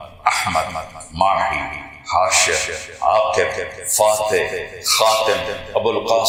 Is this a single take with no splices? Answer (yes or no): yes